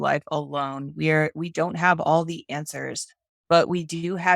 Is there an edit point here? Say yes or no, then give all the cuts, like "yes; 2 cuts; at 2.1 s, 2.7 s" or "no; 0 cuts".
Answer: no; 0 cuts